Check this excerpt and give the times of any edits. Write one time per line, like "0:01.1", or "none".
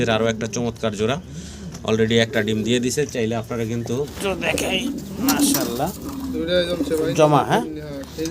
0:04.1